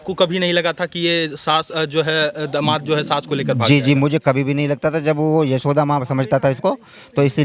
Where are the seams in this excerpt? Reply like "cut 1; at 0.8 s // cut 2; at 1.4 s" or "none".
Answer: none